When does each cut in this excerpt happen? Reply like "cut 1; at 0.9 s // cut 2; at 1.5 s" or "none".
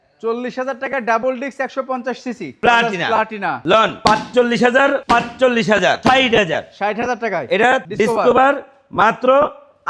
cut 1; at 2.6 s // cut 2; at 7.8 s